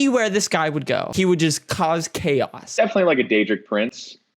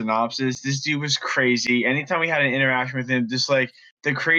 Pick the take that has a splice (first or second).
first